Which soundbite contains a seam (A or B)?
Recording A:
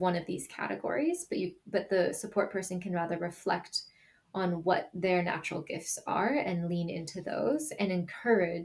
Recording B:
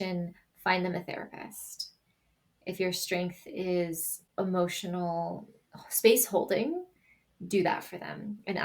B